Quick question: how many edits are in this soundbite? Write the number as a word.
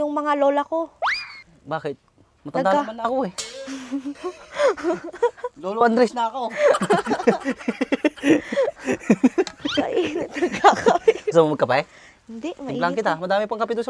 zero